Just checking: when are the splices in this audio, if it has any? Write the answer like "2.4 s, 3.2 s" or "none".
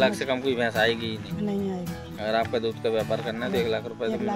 none

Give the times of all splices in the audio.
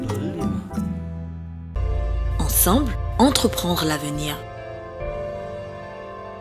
1.8 s

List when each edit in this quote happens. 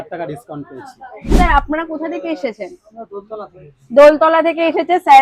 1.3 s

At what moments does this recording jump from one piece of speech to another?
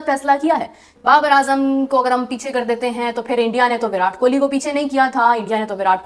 1.0 s

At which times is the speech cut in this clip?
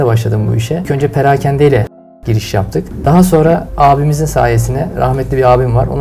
0.9 s, 2.6 s, 3.7 s

